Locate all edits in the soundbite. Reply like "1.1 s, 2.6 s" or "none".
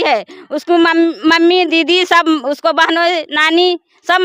none